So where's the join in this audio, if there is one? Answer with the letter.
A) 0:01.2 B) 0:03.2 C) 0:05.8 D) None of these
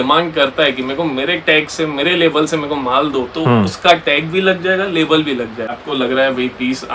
C